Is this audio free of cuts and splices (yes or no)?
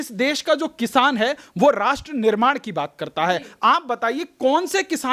yes